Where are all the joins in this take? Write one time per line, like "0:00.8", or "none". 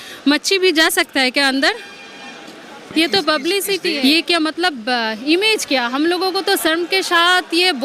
0:04.0